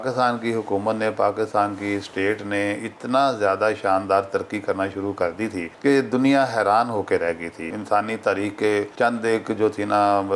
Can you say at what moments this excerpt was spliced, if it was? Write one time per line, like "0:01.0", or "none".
0:05.7
0:07.7
0:08.9